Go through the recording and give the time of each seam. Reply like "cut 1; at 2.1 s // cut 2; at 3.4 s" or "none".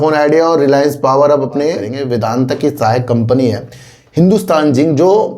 cut 1; at 1.9 s

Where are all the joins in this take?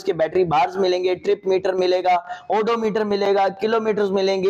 none

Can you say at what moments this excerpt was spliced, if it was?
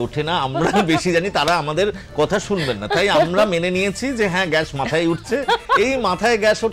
none

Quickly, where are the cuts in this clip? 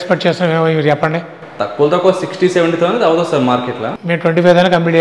cut 1; at 3.9 s

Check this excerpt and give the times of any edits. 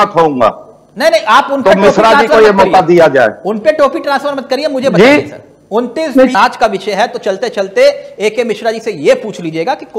cut 1; at 6.3 s

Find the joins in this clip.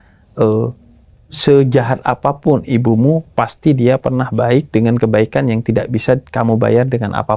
none

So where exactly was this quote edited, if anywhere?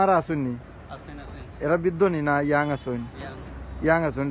none

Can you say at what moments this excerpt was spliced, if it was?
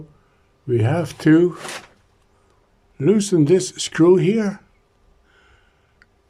none

